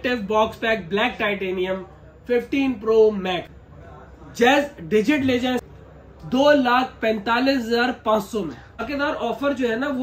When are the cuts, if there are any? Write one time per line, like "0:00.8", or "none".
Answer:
0:03.6
0:05.6
0:08.8